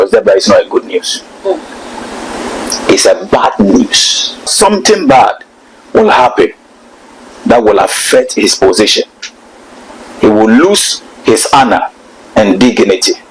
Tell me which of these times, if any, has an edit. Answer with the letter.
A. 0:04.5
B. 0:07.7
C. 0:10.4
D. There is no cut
A